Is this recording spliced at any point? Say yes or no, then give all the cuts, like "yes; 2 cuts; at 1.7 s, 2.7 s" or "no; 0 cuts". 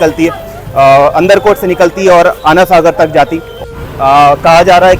yes; 1 cut; at 3.5 s